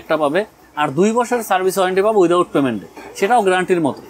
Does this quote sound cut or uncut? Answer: uncut